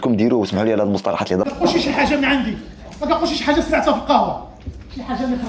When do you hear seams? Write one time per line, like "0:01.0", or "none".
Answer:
0:01.4